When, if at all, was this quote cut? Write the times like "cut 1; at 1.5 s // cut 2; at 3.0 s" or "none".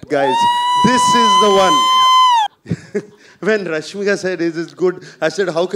cut 1; at 2.5 s